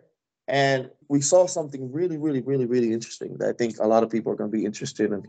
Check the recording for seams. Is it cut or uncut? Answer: cut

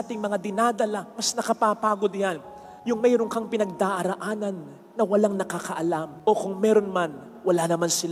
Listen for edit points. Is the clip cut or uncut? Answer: uncut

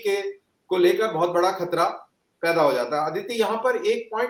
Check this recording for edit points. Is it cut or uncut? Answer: uncut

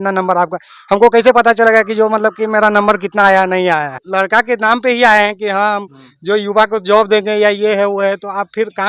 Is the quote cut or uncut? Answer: cut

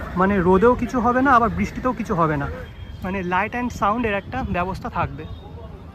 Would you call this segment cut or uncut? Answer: uncut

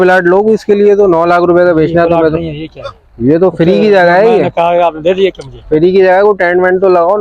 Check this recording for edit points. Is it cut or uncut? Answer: uncut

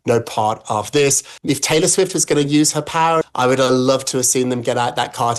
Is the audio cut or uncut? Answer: cut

